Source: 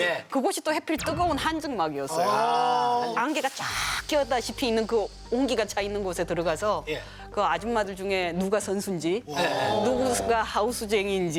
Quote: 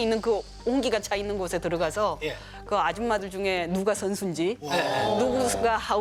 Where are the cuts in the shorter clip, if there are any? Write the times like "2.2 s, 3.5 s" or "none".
none